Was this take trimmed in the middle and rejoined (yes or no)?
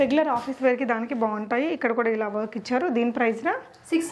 no